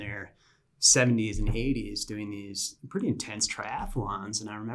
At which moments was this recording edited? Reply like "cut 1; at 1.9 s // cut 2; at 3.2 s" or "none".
none